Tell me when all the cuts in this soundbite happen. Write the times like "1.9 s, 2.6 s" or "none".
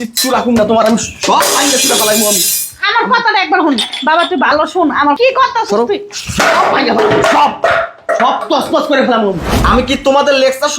5.2 s, 9.5 s